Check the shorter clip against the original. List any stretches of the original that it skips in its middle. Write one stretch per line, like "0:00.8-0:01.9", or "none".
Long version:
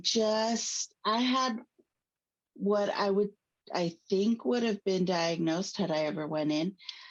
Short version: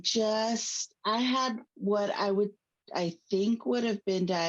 0:01.7-0:02.5